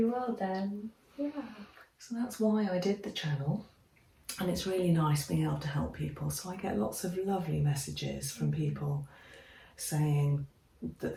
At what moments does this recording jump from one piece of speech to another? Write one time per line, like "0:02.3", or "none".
none